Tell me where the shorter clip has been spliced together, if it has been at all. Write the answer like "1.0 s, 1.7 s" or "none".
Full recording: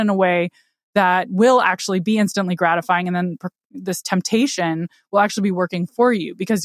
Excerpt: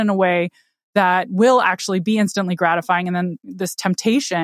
3.4 s